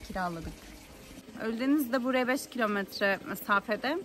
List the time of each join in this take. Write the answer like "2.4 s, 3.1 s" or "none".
1.2 s